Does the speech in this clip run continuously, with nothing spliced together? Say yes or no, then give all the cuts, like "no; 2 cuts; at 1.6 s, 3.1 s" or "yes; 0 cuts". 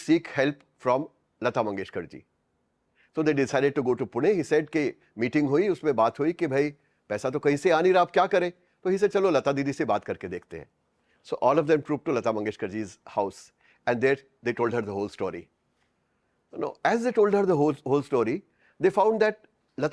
yes; 0 cuts